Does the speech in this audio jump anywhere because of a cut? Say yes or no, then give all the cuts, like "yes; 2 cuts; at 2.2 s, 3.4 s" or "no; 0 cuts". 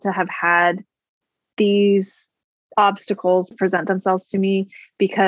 yes; 1 cut; at 3.5 s